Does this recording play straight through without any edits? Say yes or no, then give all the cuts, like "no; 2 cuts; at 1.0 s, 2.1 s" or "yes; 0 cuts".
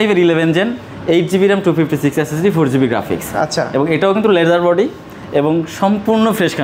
yes; 0 cuts